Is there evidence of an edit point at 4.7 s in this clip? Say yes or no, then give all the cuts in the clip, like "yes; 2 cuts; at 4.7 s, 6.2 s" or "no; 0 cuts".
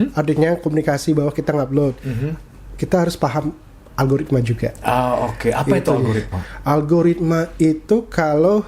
no; 0 cuts